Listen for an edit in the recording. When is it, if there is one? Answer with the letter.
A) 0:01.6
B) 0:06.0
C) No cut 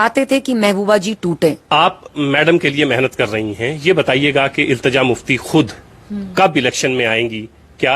A